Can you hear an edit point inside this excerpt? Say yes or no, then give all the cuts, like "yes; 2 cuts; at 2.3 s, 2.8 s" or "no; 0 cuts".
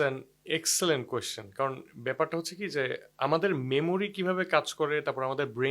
no; 0 cuts